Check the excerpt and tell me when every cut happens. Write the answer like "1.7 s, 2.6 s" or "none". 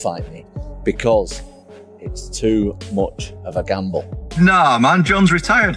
4.2 s